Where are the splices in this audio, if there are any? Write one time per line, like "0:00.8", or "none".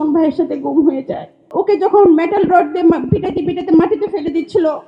0:01.4